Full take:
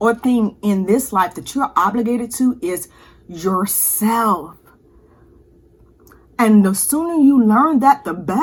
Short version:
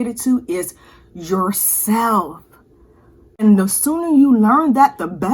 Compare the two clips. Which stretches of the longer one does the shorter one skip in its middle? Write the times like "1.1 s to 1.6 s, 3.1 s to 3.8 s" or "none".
5.6 s to 6.5 s